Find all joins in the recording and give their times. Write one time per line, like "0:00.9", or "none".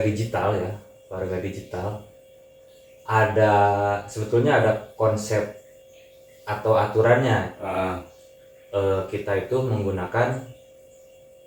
none